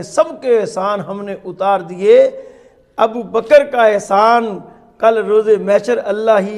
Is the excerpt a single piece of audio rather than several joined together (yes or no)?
yes